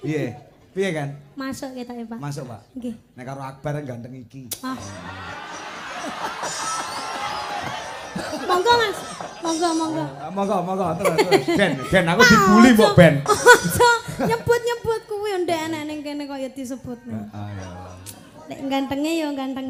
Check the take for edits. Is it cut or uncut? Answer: uncut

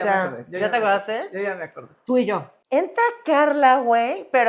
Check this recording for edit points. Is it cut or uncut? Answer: cut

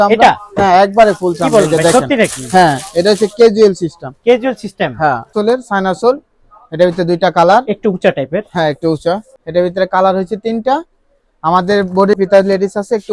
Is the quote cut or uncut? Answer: cut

